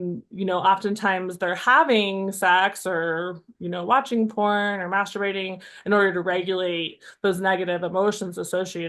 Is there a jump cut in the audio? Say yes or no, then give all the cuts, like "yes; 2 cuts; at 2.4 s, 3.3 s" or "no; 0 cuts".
no; 0 cuts